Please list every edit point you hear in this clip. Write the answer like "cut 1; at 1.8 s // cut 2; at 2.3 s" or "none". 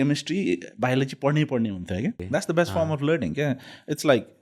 cut 1; at 2.2 s